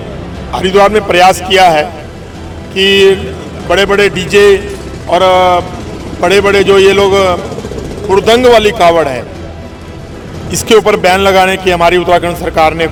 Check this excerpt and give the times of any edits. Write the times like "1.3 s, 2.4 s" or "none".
none